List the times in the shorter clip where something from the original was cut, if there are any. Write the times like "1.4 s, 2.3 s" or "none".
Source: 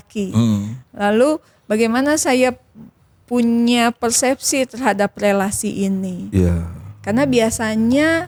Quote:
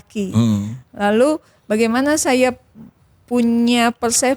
none